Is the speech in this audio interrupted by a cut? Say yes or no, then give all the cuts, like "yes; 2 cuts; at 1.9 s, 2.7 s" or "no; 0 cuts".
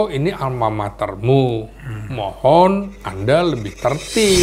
no; 0 cuts